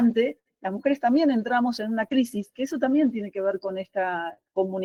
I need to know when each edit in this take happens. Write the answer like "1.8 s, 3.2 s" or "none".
none